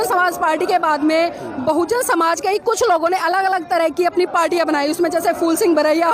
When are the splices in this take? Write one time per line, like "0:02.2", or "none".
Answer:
none